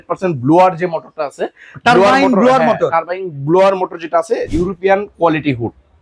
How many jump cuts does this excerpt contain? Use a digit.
1